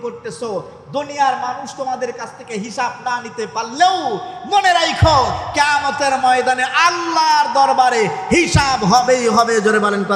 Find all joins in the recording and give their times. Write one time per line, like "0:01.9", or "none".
none